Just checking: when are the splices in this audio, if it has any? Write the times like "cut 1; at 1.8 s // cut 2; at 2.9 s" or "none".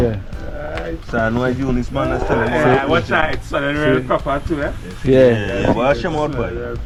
none